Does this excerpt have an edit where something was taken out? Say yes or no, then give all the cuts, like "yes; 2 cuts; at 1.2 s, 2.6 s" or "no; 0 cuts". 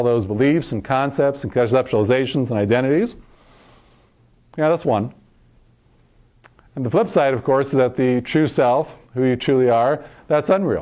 no; 0 cuts